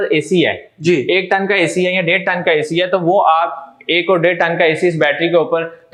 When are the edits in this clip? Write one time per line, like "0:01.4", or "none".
none